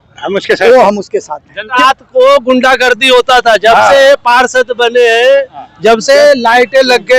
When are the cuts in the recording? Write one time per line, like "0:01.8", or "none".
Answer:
0:01.7